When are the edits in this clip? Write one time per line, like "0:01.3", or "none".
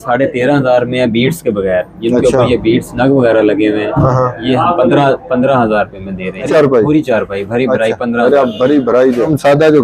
none